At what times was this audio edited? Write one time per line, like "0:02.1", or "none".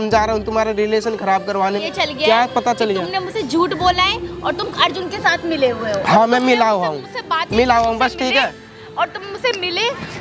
0:01.8